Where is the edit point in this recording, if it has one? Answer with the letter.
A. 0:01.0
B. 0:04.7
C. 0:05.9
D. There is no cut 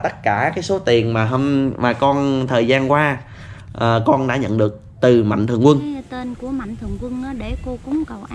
C